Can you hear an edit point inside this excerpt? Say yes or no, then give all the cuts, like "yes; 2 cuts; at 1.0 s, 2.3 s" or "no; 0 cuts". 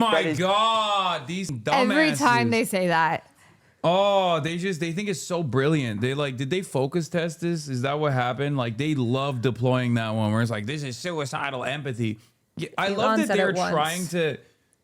yes; 1 cut; at 1.5 s